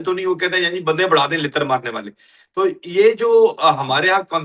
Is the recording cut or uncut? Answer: uncut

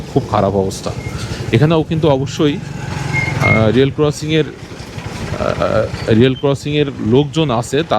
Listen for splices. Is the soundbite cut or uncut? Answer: uncut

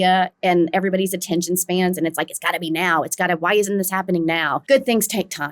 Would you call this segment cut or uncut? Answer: cut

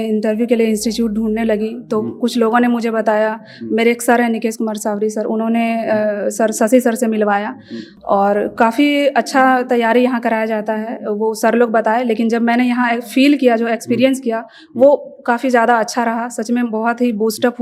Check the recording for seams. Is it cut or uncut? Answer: uncut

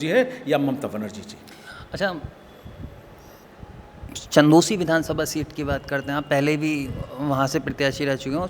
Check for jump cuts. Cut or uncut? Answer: uncut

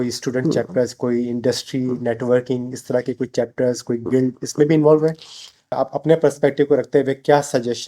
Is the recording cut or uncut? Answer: cut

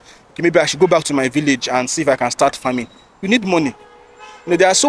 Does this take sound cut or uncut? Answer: uncut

